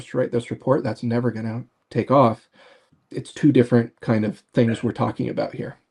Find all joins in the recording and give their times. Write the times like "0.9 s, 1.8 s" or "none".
none